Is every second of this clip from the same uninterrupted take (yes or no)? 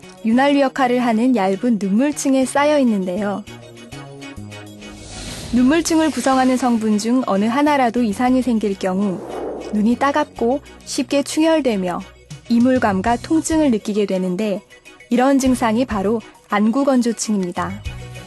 yes